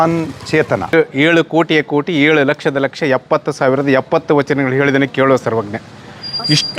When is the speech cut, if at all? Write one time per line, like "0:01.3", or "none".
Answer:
0:00.9